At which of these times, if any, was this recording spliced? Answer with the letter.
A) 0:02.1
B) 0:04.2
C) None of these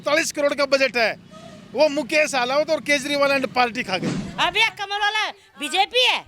B